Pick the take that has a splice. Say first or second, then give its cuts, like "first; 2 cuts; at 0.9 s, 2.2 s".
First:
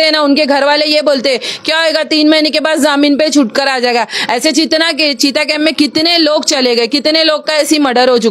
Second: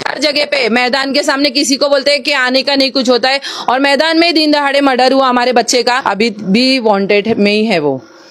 second; 1 cut; at 6.0 s